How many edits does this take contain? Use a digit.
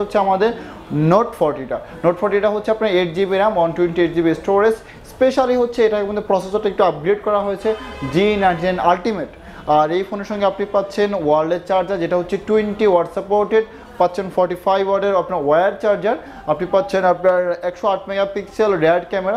0